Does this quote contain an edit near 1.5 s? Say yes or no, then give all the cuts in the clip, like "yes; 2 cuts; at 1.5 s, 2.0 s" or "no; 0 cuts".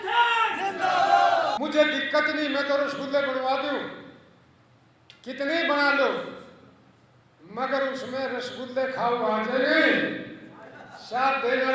yes; 1 cut; at 1.5 s